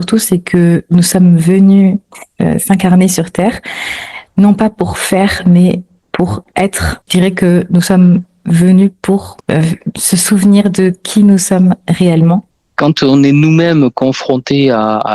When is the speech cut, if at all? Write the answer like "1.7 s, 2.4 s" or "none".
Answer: 7.0 s, 9.3 s, 12.6 s